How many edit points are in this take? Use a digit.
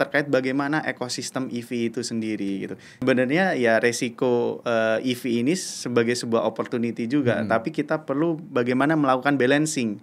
1